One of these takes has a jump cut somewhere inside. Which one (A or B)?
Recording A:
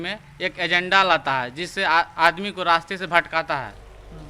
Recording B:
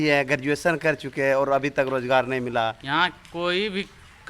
B